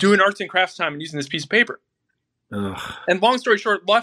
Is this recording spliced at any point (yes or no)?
no